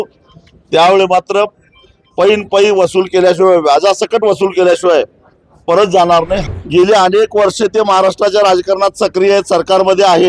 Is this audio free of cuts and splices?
no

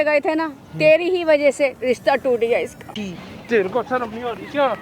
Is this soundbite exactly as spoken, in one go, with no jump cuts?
no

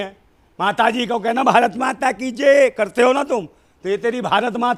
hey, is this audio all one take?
yes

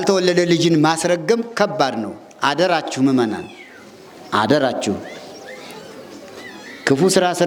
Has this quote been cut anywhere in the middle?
no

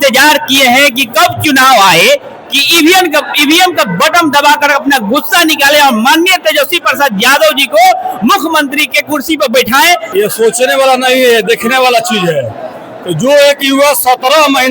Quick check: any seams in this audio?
yes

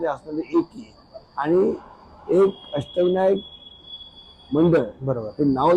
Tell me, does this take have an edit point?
no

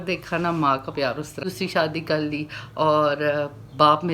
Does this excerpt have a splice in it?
yes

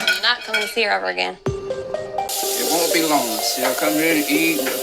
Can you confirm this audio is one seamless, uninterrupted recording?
no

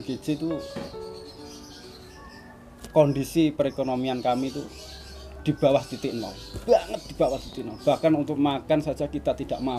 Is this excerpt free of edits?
yes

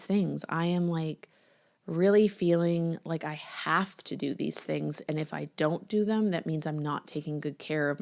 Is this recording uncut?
yes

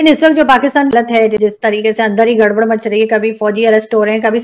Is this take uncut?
no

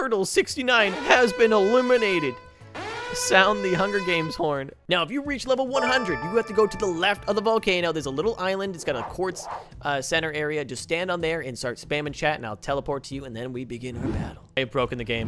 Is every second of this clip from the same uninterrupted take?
no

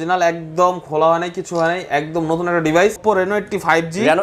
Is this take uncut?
no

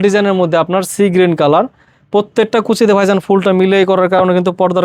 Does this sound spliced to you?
no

